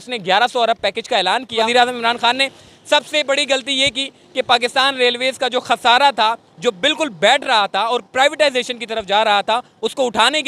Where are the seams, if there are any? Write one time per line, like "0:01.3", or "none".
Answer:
0:01.6